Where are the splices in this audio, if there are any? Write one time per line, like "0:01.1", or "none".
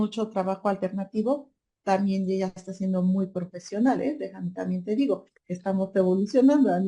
none